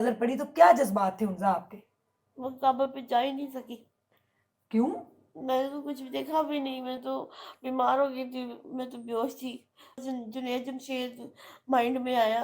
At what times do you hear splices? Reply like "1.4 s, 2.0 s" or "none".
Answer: 10.0 s